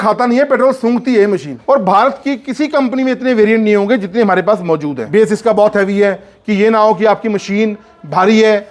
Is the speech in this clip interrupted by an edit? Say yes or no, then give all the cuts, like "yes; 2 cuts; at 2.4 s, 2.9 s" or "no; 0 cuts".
yes; 2 cuts; at 1.5 s, 5.0 s